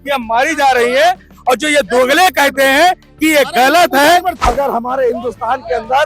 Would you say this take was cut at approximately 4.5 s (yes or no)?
yes